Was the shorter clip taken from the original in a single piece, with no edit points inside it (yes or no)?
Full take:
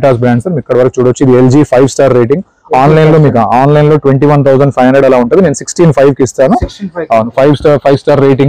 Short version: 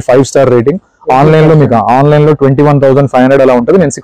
yes